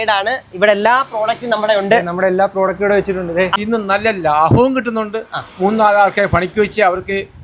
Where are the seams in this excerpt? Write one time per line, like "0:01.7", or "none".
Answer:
0:03.6